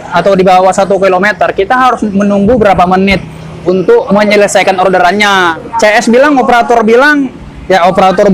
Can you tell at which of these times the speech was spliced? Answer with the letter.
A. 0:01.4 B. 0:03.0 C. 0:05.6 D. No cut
C